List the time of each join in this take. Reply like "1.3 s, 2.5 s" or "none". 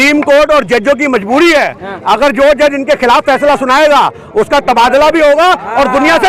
none